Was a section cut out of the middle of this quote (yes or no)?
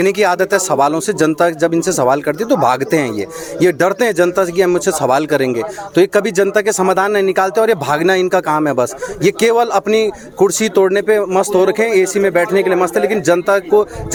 no